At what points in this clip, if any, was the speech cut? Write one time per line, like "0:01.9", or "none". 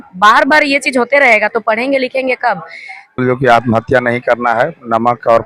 0:03.2

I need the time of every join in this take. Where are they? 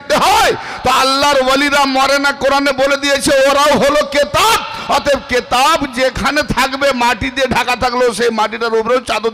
none

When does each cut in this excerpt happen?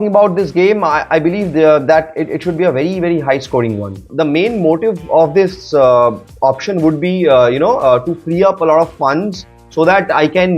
0:04.1

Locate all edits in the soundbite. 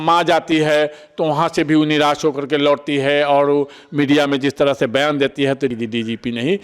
0:05.7

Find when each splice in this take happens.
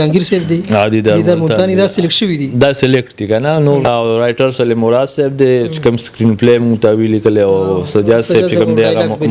0:03.8

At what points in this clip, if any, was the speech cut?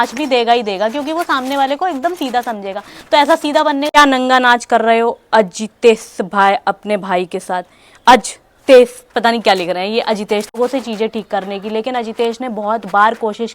0:03.9
0:10.5

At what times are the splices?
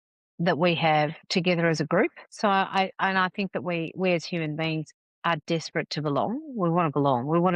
0:01.2
0:02.2

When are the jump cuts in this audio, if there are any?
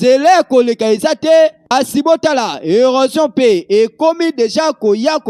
0:01.7

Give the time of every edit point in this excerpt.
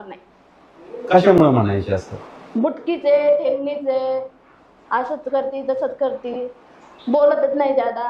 none

